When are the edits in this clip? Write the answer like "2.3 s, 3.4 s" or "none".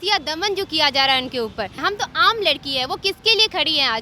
1.8 s